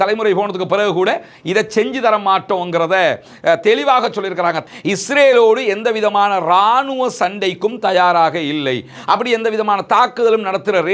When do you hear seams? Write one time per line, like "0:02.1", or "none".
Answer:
0:04.6

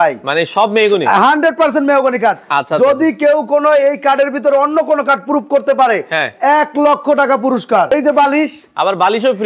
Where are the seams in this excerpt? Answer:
0:07.9

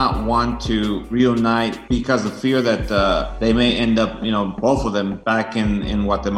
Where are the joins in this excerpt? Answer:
0:01.1
0:01.8
0:03.3
0:04.7

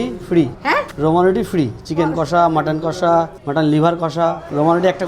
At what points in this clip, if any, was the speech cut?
none

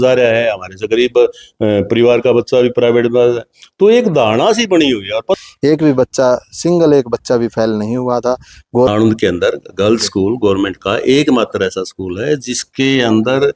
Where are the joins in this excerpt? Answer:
0:05.4
0:08.9

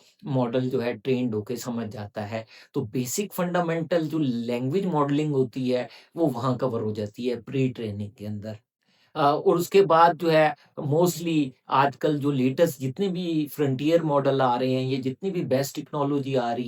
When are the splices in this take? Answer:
none

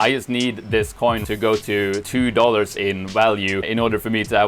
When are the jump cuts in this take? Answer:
0:01.2
0:02.1
0:03.7

